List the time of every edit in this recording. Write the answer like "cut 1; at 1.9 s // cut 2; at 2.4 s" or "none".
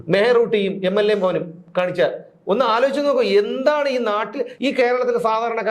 cut 1; at 4.4 s